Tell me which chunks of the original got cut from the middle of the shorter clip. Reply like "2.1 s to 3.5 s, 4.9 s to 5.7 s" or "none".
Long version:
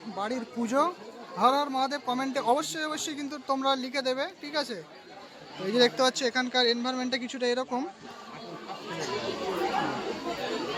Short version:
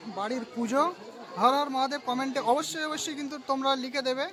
none